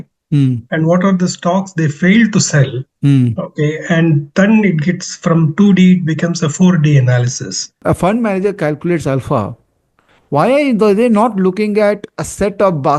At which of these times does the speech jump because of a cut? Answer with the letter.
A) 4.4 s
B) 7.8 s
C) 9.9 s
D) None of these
B